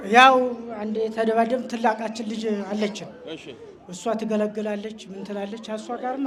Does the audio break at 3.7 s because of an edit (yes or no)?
no